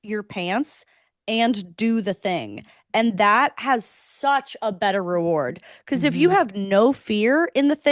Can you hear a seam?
no; 0 cuts

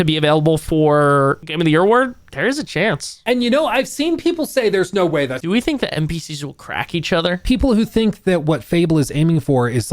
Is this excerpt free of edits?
no; 4 cuts; at 1.5 s, 3.1 s, 5.4 s, 7.4 s

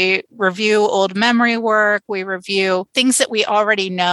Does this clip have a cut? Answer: no; 0 cuts

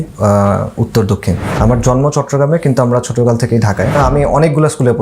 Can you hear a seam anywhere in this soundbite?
yes; 2 cuts; at 1.5 s, 4.0 s

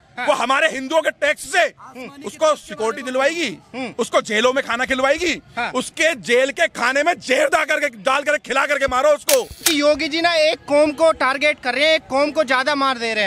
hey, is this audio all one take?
no; 1 cut; at 9.6 s

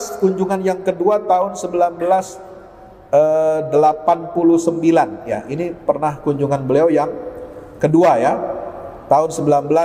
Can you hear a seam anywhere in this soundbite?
no; 0 cuts

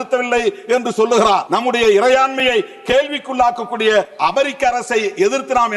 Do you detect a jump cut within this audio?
yes; 2 cuts; at 1.5 s, 4.1 s

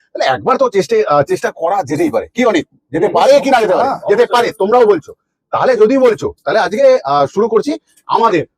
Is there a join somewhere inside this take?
no; 0 cuts

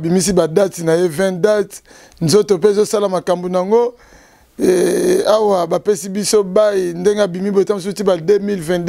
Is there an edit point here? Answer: no; 0 cuts

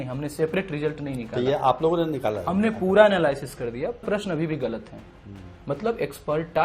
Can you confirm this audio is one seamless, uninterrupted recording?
no; 1 cut; at 4.0 s

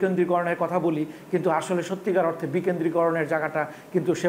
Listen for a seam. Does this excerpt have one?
no; 0 cuts

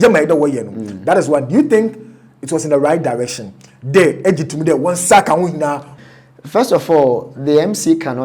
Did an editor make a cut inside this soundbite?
yes; 1 cut; at 5.9 s

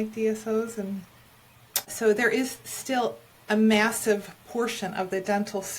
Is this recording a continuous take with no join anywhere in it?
no; 1 cut; at 1.9 s

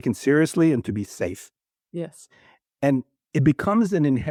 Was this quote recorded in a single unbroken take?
yes; 0 cuts

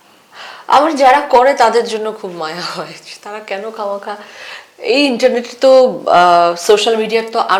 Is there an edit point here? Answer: no; 0 cuts

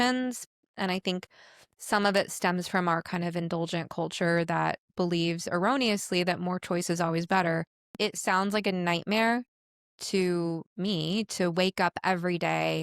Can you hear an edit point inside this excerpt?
yes; 1 cut; at 8.0 s

